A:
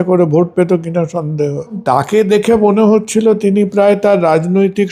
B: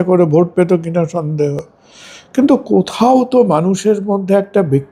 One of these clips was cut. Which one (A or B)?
A